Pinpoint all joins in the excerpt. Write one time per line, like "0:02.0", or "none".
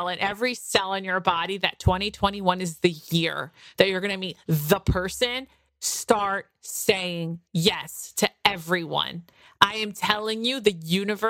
none